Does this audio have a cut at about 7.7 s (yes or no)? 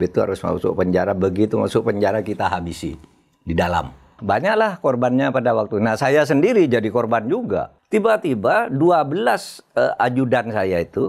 yes